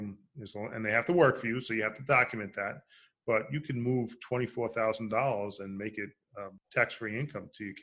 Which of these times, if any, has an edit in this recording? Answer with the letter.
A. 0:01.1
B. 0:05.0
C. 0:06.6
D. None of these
C